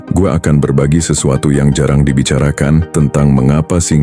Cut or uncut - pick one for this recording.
cut